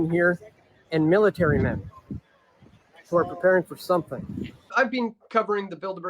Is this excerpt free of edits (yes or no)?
no